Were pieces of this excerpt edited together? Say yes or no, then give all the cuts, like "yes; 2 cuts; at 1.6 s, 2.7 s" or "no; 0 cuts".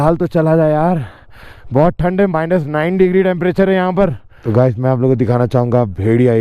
yes; 1 cut; at 4.3 s